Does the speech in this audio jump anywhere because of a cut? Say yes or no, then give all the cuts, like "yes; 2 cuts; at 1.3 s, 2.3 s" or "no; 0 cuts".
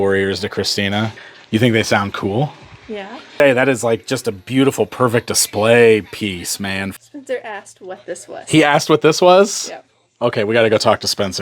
yes; 3 cuts; at 1.2 s, 3.3 s, 7.0 s